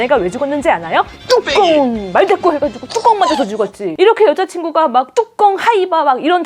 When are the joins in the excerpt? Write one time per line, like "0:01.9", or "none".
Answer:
none